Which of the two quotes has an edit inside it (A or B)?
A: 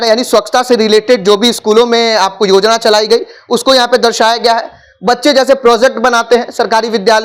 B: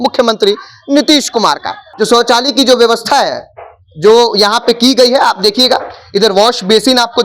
B